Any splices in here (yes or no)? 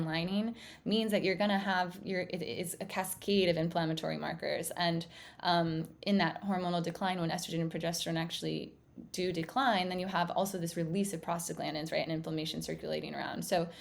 no